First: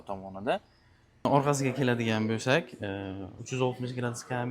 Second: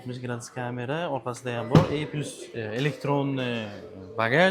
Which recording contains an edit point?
first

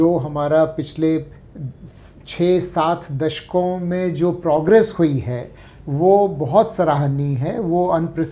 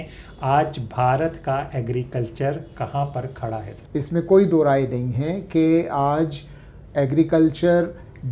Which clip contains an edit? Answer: second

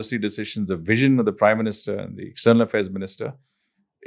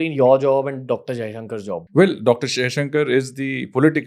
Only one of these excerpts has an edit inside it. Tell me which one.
second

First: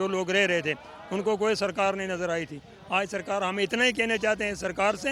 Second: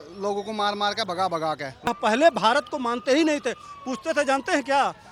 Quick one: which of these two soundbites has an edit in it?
second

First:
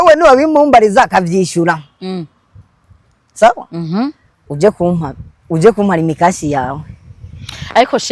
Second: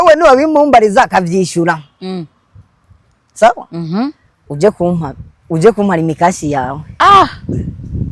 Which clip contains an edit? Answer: second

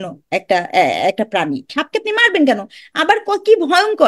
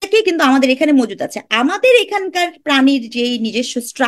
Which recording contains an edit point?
first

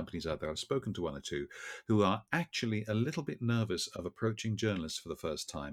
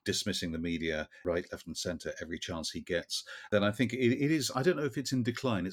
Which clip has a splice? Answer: second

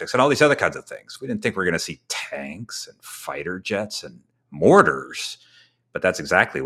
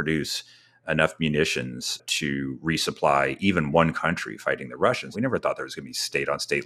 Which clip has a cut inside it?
second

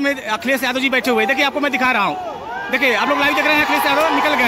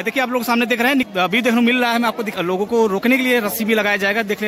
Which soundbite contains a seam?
second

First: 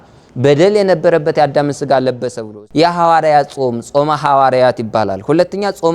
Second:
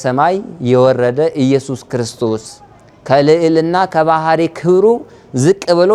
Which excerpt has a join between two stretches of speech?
first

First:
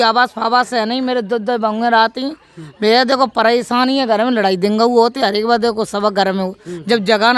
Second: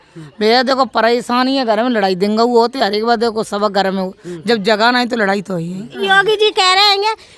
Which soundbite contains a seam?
second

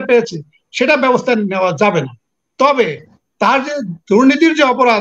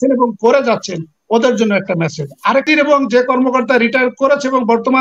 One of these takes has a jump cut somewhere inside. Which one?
second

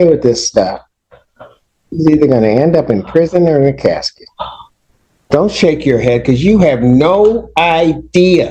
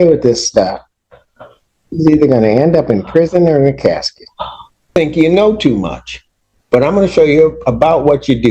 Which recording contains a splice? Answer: second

